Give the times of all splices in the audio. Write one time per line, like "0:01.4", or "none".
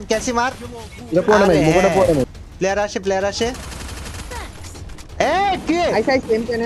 0:02.4